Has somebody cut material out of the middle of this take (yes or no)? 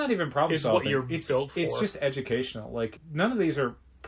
yes